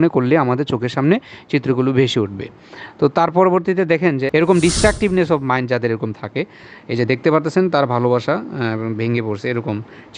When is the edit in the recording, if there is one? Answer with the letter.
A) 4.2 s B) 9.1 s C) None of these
A